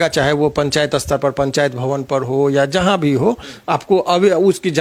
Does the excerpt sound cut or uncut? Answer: uncut